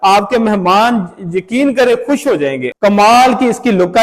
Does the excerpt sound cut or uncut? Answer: cut